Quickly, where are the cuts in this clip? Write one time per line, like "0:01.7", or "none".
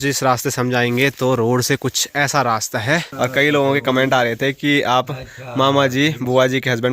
0:03.1